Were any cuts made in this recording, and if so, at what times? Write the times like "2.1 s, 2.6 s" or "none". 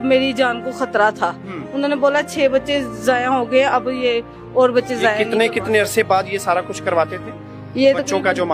none